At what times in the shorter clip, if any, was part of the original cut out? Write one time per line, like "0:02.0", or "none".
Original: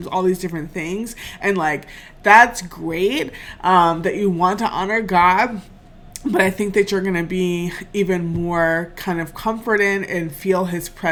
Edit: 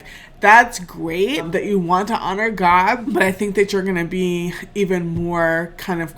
0:01.5
0:03.0